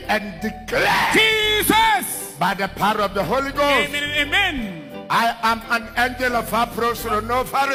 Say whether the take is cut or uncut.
uncut